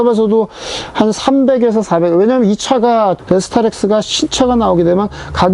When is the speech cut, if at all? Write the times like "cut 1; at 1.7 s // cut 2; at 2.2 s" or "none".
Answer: cut 1; at 3.2 s

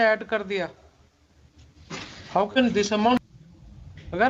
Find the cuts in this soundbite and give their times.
cut 1; at 3.3 s

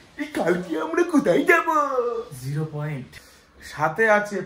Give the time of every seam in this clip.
cut 1; at 3.1 s

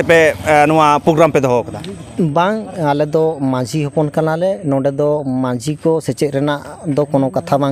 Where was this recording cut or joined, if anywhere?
none

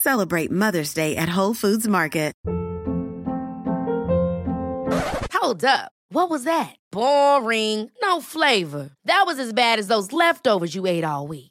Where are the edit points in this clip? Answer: cut 1; at 2.4 s

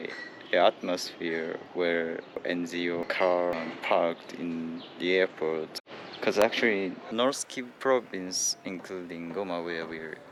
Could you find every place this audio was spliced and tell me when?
none

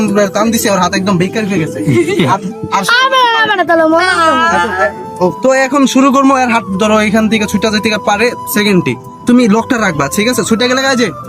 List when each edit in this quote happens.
cut 1; at 5.4 s

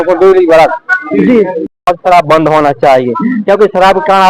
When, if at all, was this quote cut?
cut 1; at 1.9 s

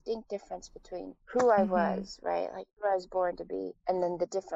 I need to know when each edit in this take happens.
cut 1; at 1.2 s // cut 2; at 2.6 s // cut 3; at 3.7 s

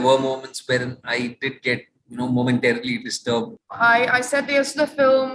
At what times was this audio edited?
cut 1; at 3.6 s

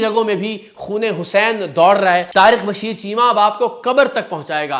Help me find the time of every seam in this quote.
cut 1; at 2.3 s

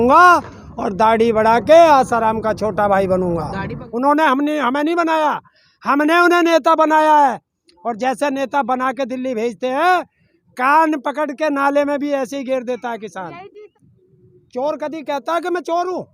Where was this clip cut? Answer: cut 1; at 3.8 s // cut 2; at 13.7 s

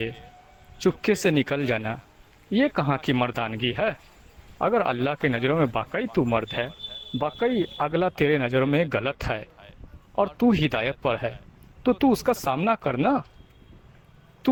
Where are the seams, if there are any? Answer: none

